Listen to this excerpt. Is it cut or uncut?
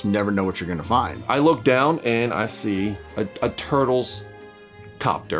uncut